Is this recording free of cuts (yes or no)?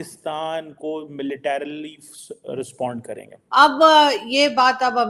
no